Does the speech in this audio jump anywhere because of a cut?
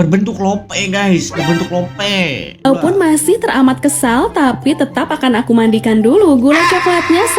yes; 1 cut; at 2.6 s

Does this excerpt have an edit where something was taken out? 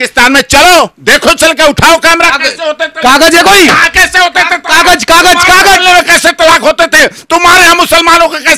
no; 0 cuts

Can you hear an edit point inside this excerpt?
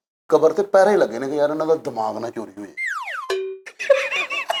no; 0 cuts

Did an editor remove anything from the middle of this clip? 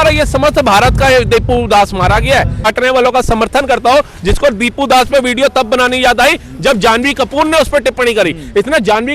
yes; 1 cut; at 2.7 s

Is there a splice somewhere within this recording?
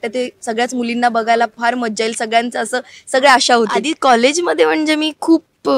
yes; 1 cut; at 3.9 s

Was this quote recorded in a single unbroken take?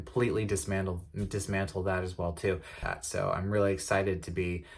no; 1 cut; at 2.8 s

